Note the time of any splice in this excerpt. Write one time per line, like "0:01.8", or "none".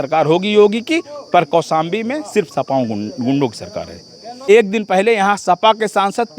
0:04.5